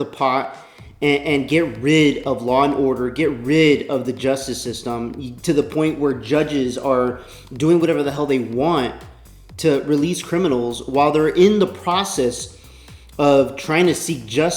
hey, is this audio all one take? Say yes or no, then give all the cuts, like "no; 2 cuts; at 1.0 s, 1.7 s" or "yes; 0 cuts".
yes; 0 cuts